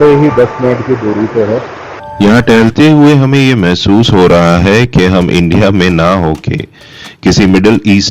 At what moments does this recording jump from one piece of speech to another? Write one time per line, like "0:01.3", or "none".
0:02.0